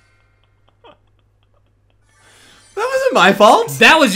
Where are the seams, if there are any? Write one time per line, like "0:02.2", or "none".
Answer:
none